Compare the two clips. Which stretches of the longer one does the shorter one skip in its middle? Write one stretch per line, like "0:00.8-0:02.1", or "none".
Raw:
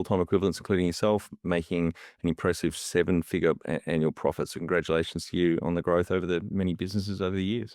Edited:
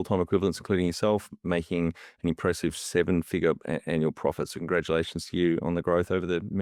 none